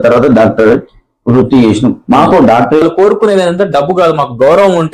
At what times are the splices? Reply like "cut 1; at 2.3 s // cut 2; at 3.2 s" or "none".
cut 1; at 2.8 s

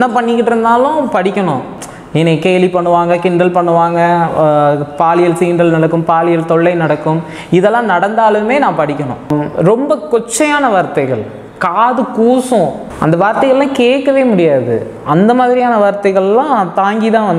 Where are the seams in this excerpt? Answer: cut 1; at 2.0 s // cut 2; at 9.6 s // cut 3; at 12.9 s

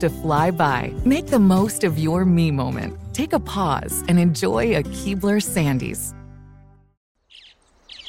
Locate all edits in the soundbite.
cut 1; at 6.0 s

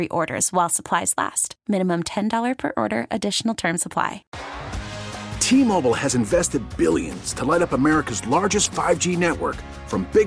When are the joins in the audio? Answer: cut 1; at 4.3 s

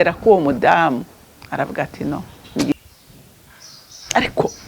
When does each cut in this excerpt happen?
cut 1; at 2.7 s

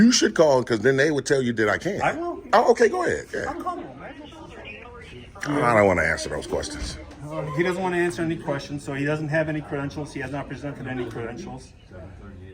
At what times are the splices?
cut 1; at 4.0 s

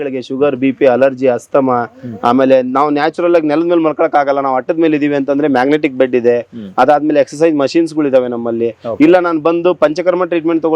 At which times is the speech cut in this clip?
none

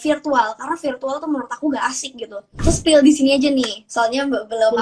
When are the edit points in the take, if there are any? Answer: cut 1; at 2.5 s

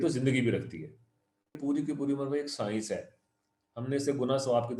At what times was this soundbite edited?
cut 1; at 1.6 s

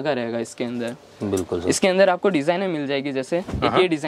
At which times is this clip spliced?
none

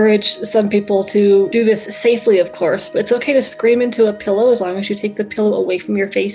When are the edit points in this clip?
cut 1; at 1.5 s

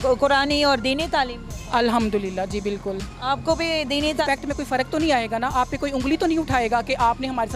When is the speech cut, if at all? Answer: cut 1; at 4.2 s

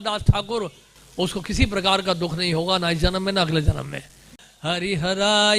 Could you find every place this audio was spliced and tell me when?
cut 1; at 4.5 s

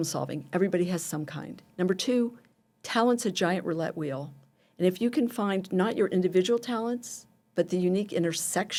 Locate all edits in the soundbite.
none

